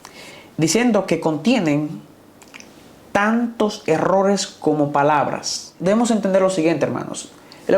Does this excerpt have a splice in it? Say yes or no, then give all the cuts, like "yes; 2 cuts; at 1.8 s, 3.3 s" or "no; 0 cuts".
yes; 1 cut; at 5.7 s